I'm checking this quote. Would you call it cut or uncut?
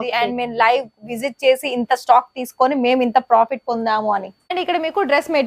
cut